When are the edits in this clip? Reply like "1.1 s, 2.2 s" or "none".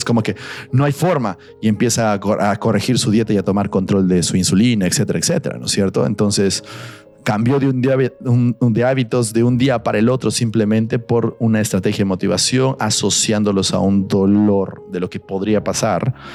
none